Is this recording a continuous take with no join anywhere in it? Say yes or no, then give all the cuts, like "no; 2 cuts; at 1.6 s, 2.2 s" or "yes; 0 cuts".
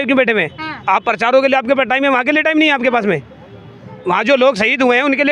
yes; 0 cuts